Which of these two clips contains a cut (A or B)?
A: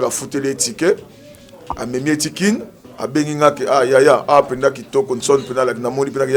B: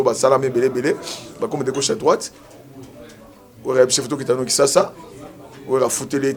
A